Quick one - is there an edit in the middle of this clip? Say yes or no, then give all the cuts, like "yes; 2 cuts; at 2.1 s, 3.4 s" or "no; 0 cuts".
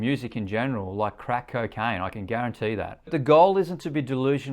yes; 1 cut; at 3.1 s